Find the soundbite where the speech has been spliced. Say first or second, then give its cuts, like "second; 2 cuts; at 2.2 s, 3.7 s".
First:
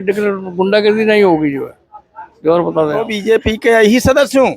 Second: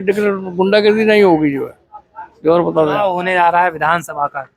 first; 1 cut; at 3.0 s